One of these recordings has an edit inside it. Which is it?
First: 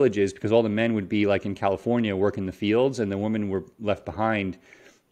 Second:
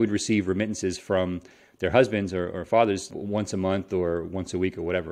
second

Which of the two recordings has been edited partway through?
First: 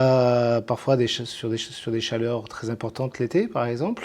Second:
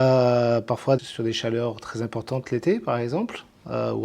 second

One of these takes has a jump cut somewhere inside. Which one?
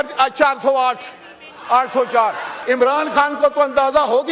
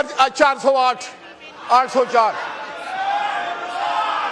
first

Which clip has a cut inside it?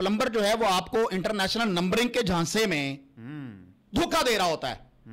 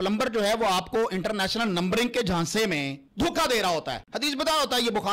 second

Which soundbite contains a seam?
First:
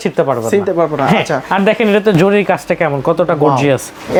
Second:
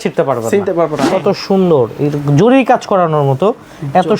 second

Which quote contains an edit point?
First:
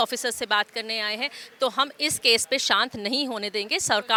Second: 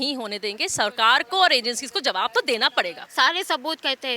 second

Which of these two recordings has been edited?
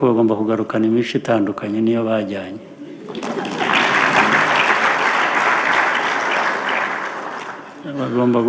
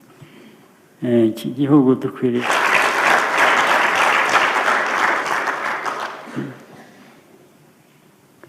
second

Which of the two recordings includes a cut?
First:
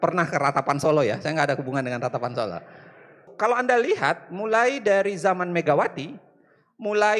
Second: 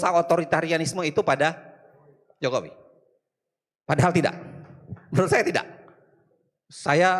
first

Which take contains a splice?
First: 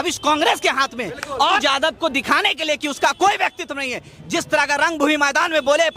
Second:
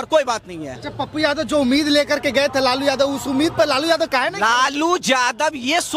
first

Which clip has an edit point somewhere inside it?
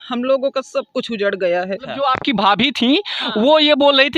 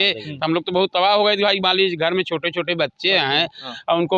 first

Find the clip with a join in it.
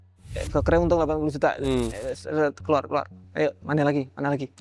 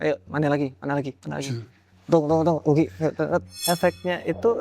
second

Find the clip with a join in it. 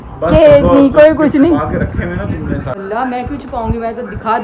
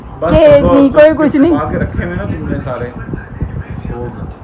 first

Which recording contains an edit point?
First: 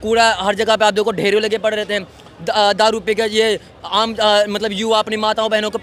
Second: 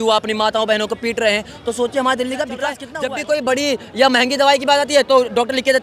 second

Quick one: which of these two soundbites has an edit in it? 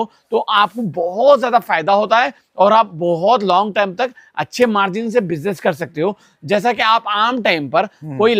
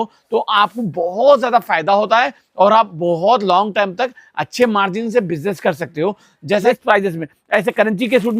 second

